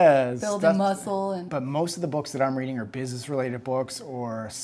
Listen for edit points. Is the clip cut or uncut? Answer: cut